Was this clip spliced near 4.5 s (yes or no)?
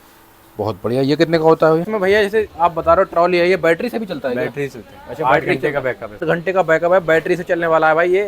no